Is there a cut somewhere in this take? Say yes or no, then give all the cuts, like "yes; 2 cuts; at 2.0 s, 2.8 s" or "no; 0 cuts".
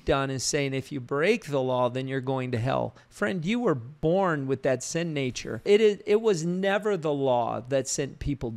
yes; 2 cuts; at 3.9 s, 5.6 s